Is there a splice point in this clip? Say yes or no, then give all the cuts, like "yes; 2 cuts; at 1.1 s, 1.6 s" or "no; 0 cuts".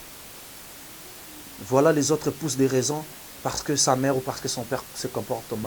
no; 0 cuts